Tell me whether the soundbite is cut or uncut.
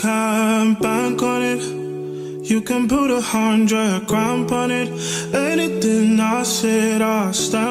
uncut